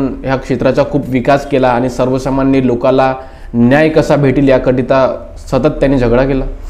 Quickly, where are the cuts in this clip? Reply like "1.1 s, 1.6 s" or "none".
none